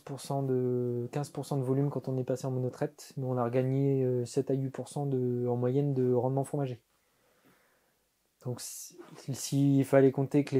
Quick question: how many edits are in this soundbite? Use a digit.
0